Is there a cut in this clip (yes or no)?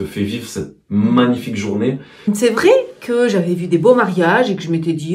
yes